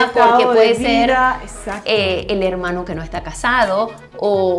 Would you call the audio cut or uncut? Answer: uncut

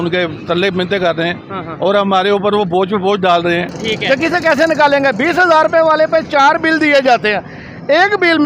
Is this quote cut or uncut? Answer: cut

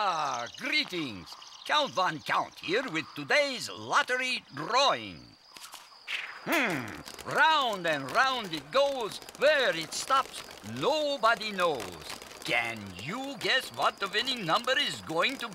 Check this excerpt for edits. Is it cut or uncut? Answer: uncut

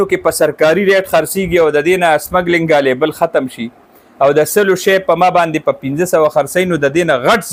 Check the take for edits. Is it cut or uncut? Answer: uncut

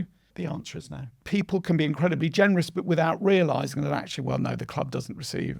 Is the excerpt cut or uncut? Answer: cut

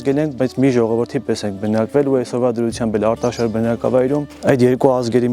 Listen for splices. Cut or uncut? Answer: cut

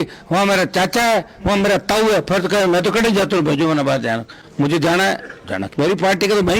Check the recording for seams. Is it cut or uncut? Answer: uncut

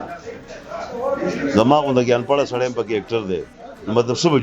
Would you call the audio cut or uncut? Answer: uncut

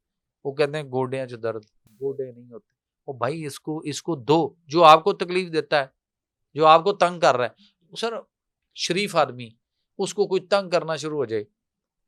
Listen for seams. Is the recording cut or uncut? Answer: uncut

